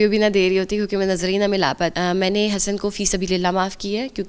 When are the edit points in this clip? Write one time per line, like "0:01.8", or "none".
0:01.9